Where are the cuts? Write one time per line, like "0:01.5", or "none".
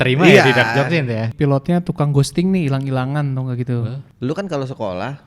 0:01.3
0:04.0